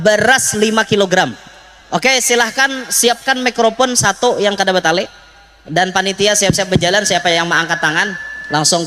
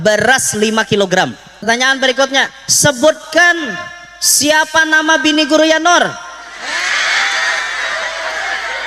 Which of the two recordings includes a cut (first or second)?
second